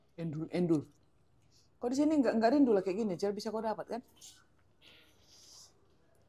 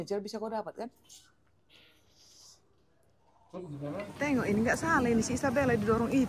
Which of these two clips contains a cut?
second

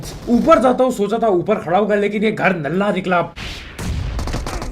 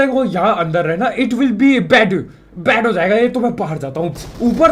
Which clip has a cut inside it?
first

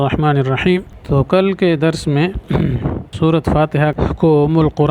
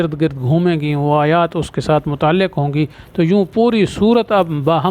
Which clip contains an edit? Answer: first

